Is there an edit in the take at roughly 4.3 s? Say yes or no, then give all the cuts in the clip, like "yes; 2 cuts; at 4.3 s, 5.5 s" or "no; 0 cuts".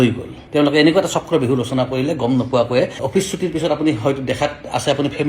no; 1 cut; at 3.0 s